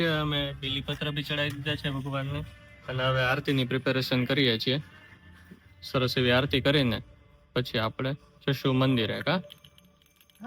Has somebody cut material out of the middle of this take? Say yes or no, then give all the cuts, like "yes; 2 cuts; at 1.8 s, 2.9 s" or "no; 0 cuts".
no; 0 cuts